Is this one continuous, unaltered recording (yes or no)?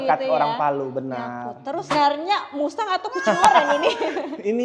no